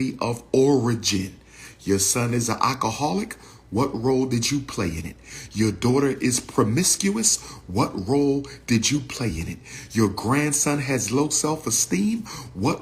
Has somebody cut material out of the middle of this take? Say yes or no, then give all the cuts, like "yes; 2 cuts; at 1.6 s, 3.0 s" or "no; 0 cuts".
no; 0 cuts